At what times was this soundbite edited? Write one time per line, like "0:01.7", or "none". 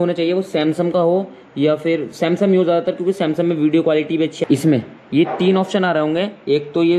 0:04.4